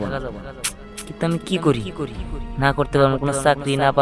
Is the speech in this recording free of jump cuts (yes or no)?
yes